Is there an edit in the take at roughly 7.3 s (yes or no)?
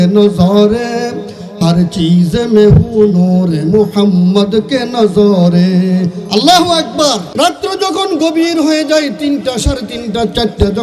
yes